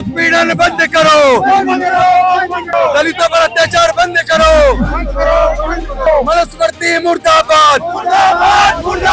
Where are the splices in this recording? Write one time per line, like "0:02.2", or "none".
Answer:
0:02.7
0:06.1